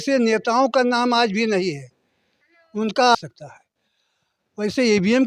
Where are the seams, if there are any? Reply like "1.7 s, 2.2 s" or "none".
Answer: 3.1 s